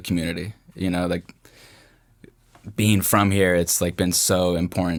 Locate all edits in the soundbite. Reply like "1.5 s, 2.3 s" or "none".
none